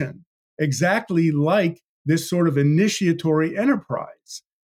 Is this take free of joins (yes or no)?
yes